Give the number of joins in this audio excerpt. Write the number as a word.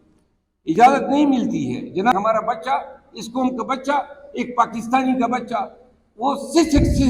one